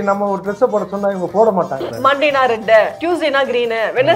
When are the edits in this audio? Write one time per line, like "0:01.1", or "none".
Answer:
0:01.9
0:03.0